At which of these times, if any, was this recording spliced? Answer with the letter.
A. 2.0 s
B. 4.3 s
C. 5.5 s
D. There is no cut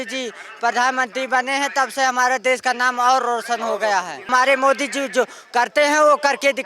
B